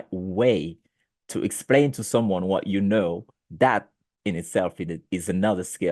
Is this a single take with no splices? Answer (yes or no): yes